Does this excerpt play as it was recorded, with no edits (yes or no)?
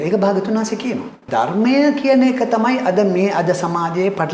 no